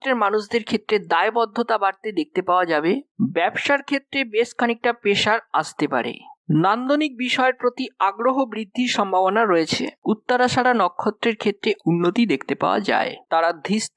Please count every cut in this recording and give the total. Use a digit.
2